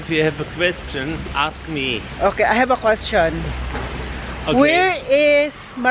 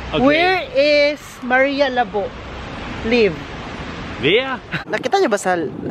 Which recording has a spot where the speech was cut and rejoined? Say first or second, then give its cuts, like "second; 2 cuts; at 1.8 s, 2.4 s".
second; 1 cut; at 4.8 s